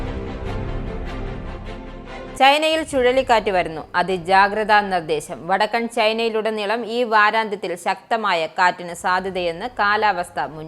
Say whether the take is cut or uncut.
cut